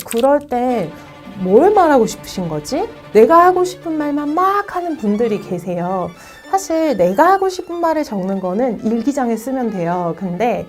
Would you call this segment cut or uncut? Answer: cut